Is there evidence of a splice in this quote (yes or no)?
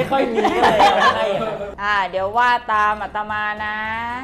yes